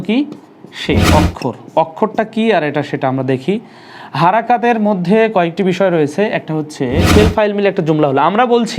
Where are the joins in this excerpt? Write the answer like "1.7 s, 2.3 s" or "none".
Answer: 1.1 s, 7.1 s